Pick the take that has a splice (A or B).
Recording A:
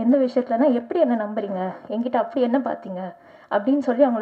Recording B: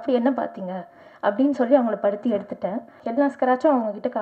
B